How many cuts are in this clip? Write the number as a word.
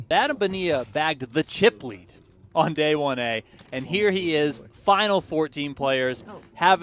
zero